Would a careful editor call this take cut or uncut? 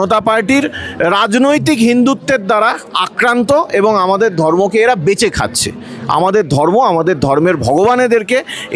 uncut